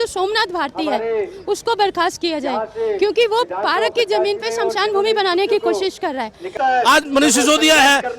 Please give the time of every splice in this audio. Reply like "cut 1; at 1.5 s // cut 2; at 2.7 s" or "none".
cut 1; at 6.5 s